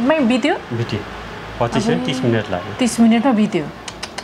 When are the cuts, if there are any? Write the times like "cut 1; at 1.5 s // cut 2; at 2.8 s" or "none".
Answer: none